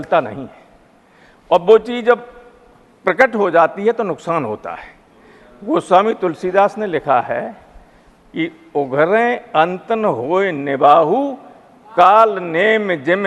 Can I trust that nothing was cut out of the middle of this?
yes; 0 cuts

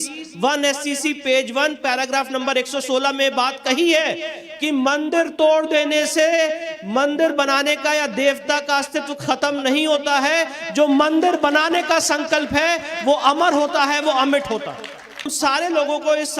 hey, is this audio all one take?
no; 1 cut; at 15.3 s

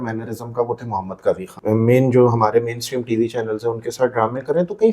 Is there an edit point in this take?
yes; 1 cut; at 1.6 s

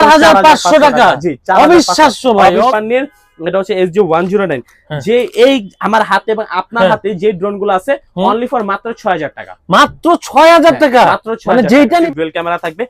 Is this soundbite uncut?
no; 2 cuts; at 2.7 s, 12.1 s

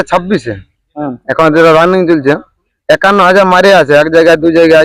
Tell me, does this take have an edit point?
no; 0 cuts

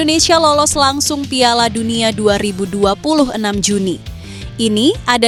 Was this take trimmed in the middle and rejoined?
no; 0 cuts

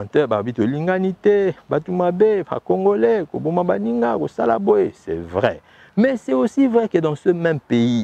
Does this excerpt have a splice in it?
no; 0 cuts

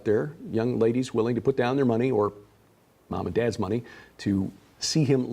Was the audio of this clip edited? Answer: yes; 1 cut; at 3.1 s

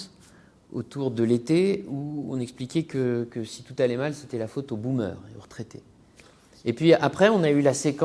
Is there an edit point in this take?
no; 0 cuts

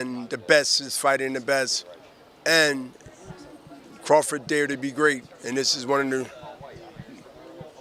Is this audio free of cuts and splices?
yes; 0 cuts

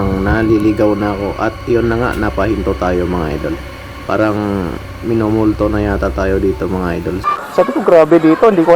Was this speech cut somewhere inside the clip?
yes; 1 cut; at 7.2 s

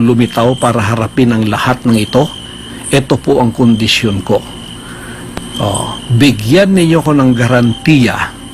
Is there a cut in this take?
no; 0 cuts

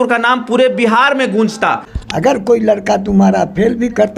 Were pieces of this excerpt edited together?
yes; 1 cut; at 1.9 s

